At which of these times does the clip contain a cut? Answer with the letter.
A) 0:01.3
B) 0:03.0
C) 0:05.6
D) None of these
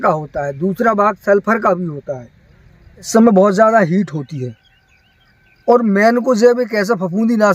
B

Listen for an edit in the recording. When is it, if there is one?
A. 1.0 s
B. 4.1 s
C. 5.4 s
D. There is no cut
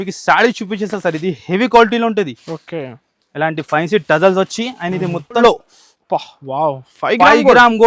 C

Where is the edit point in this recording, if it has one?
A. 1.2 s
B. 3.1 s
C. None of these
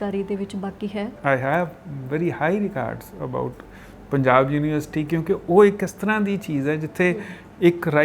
A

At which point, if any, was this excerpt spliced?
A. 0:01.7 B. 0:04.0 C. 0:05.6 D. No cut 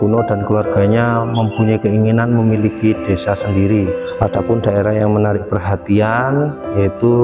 B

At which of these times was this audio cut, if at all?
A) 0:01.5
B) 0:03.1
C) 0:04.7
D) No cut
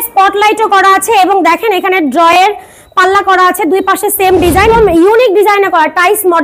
C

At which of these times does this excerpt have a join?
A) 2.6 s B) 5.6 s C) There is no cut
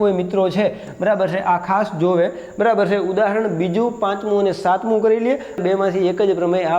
B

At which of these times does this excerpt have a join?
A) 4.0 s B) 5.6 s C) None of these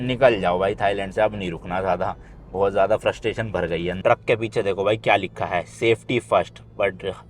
A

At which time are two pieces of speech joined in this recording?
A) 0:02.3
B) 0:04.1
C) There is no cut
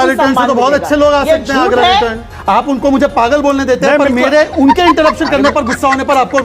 A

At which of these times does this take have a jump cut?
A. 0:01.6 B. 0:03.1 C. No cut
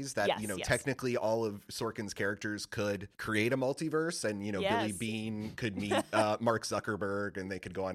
B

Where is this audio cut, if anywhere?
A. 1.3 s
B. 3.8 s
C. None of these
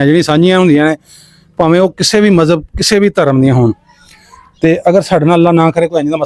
C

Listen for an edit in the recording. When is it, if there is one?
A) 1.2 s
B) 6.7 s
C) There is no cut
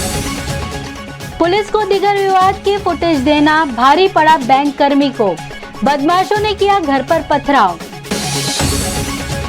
A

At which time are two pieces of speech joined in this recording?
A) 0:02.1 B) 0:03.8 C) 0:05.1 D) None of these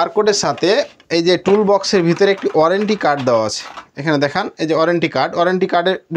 D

